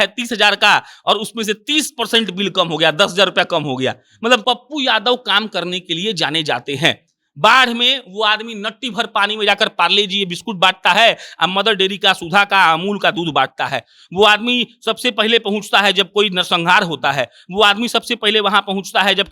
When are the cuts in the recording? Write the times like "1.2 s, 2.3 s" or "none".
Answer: 4.4 s